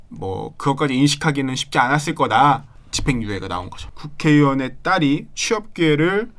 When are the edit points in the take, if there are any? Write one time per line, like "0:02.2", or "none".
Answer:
0:02.7
0:03.9